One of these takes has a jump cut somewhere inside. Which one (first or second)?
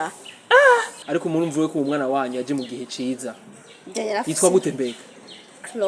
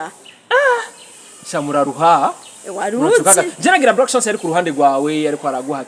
first